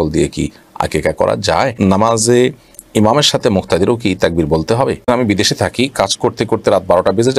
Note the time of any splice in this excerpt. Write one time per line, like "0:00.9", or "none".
0:01.7
0:05.1

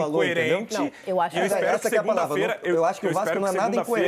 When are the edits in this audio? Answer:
none

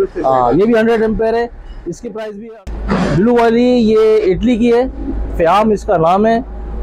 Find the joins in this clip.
0:02.6

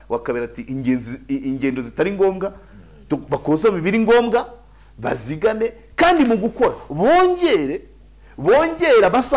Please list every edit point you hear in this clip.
none

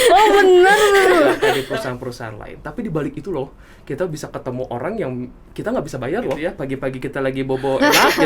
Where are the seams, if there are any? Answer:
0:01.6
0:06.5

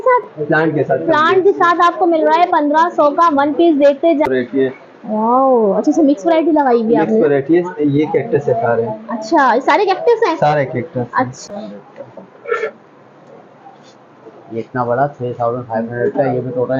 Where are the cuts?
0:04.3
0:11.5

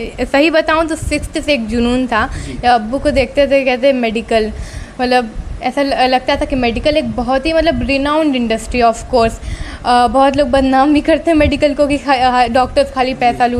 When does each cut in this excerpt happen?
none

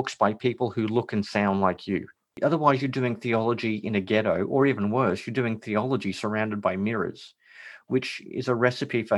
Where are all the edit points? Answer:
0:02.3

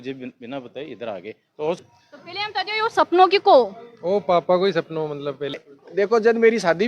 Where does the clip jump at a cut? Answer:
0:01.8
0:05.7

